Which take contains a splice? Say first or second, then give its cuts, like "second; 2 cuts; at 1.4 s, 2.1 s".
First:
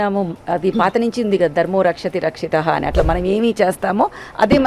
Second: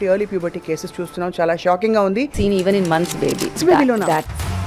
second; 2 cuts; at 2.3 s, 3.6 s